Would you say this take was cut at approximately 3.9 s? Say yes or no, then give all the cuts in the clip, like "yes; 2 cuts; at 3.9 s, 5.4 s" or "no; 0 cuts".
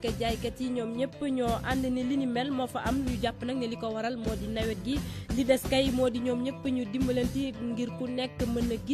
yes; 1 cut; at 3.9 s